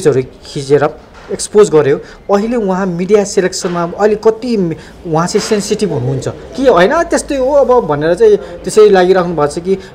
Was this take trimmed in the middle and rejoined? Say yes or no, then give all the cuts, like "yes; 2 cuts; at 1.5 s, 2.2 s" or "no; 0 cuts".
no; 0 cuts